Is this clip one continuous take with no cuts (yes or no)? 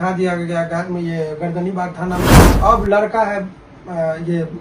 no